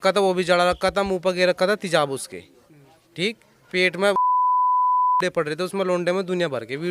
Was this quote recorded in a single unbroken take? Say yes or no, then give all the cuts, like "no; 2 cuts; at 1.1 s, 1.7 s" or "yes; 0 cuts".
yes; 0 cuts